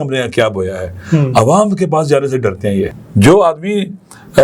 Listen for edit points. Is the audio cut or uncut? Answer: cut